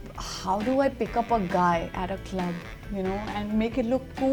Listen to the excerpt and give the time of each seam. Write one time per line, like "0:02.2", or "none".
none